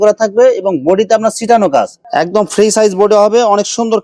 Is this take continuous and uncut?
no; 1 cut; at 2.0 s

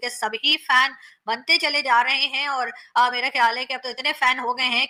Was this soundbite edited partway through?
no; 0 cuts

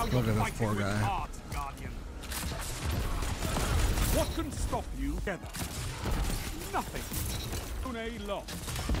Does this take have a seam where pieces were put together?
yes; 2 cuts; at 5.2 s, 7.9 s

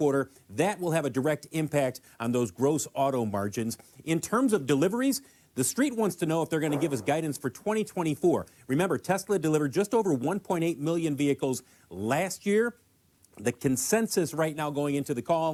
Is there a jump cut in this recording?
no; 0 cuts

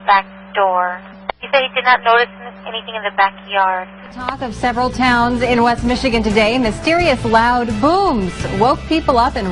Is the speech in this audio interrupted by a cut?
yes; 1 cut; at 3.4 s

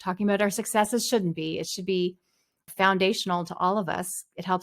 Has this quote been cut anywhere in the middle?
yes; 1 cut; at 2.7 s

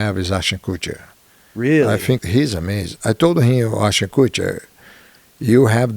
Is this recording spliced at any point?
yes; 1 cut; at 2.2 s

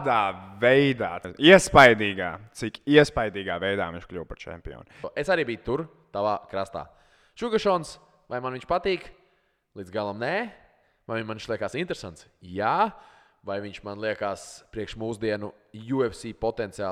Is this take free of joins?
no; 2 cuts; at 1.2 s, 5.0 s

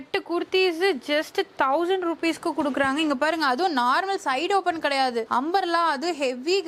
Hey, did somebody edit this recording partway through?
no; 0 cuts

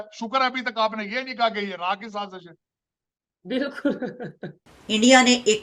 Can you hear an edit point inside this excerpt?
yes; 1 cut; at 4.7 s

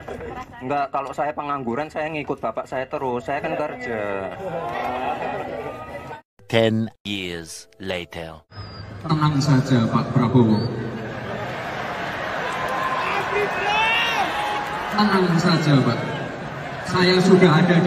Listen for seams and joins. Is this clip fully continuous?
yes; 0 cuts

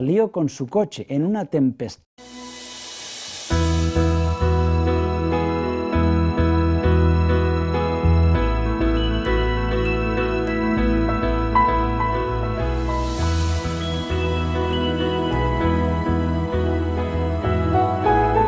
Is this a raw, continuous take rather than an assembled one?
yes; 0 cuts

